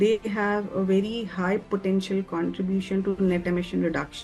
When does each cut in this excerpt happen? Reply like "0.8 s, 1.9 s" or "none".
none